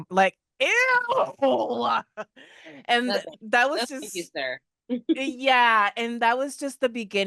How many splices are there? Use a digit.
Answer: 0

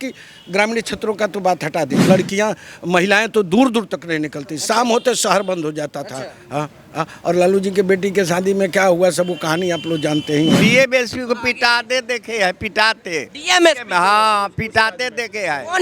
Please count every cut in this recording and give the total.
2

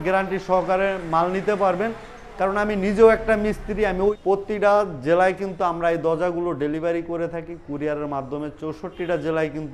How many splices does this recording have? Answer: 1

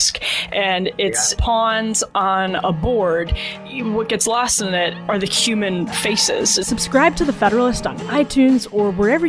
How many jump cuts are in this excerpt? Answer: 2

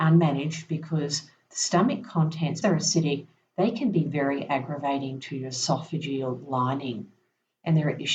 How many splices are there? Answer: 1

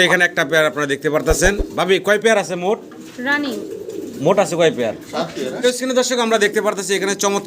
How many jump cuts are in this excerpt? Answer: 1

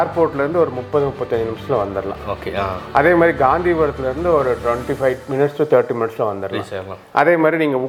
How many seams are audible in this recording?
0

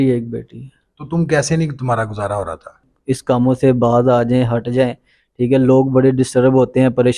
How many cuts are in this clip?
1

